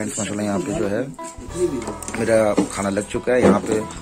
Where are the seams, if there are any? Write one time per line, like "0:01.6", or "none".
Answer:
none